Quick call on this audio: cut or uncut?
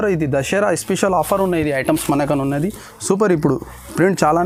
uncut